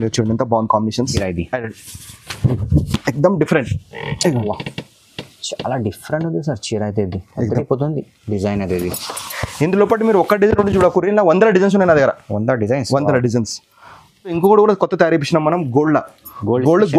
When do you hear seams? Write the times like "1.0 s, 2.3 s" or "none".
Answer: 1.1 s, 14.4 s